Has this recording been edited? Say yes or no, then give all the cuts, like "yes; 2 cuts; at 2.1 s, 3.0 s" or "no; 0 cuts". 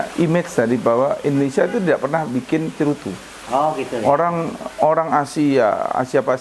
no; 0 cuts